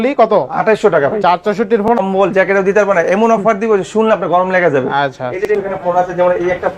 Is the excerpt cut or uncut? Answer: cut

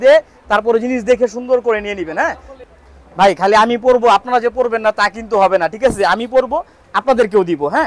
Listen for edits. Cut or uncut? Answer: uncut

